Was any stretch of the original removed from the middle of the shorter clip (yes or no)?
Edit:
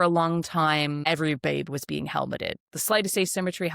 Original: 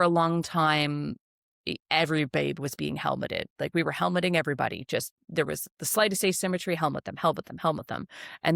yes